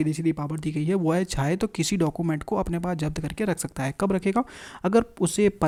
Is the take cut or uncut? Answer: uncut